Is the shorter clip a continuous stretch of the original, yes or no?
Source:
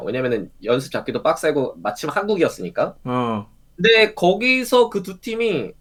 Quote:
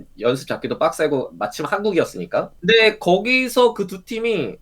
no